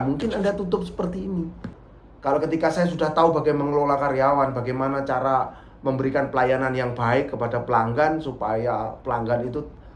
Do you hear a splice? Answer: yes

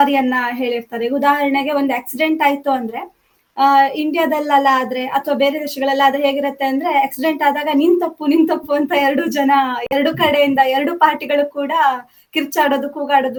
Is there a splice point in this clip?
no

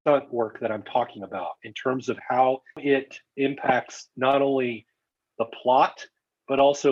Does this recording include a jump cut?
no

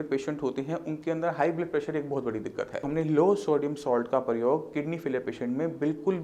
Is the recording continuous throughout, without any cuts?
no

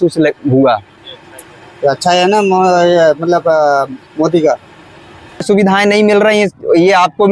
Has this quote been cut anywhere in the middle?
yes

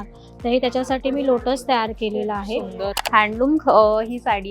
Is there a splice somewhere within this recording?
yes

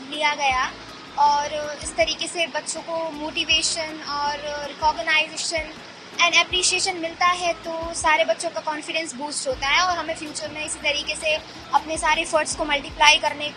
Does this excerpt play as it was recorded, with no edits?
yes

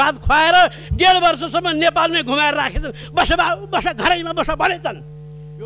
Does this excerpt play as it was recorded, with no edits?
yes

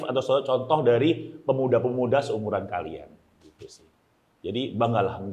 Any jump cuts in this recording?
no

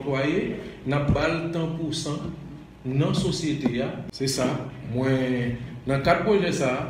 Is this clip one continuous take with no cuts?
no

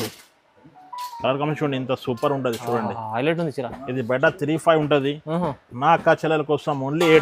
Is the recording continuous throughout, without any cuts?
yes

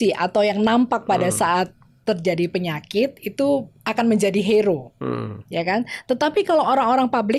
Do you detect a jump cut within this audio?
no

